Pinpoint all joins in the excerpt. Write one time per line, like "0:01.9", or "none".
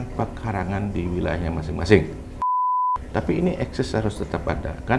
0:02.6